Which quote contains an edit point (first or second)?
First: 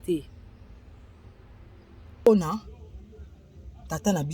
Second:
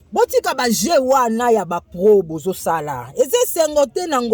first